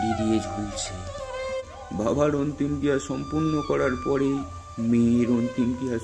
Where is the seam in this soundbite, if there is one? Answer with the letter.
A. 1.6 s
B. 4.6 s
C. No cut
A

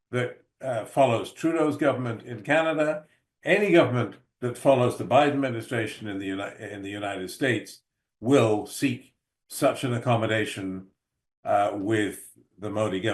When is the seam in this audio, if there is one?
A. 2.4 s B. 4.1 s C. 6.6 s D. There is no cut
D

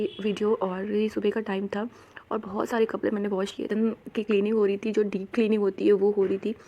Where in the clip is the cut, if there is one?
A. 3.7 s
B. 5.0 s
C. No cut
A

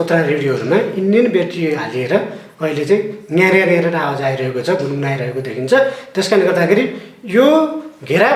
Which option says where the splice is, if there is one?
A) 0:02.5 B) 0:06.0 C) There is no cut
C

